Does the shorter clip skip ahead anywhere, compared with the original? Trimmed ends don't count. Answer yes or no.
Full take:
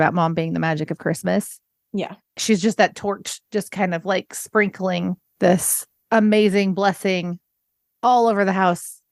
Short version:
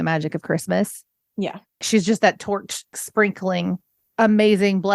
yes